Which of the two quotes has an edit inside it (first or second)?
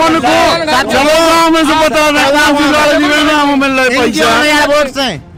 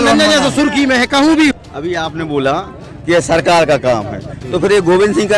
second